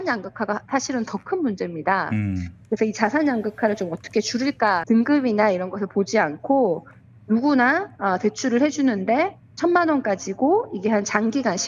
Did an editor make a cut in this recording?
yes; 1 cut; at 4.8 s

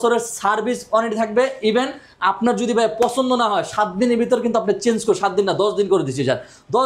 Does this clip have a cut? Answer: no; 0 cuts

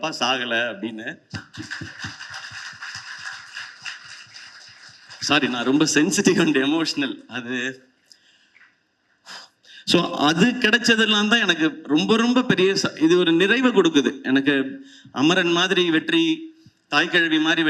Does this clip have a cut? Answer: no; 0 cuts

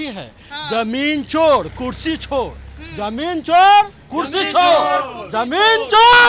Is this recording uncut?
yes; 0 cuts

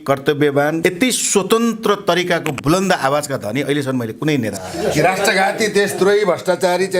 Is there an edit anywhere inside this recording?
yes; 2 cuts; at 0.8 s, 4.6 s

